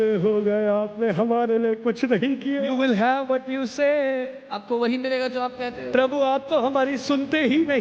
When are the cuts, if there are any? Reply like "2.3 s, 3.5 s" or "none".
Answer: 2.7 s